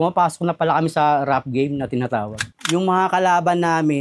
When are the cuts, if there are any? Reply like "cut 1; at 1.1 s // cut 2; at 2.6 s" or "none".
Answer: cut 1; at 2.5 s